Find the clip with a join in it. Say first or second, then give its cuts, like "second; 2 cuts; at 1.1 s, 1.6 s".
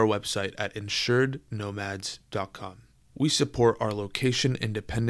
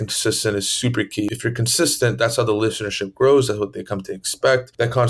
second; 1 cut; at 1.3 s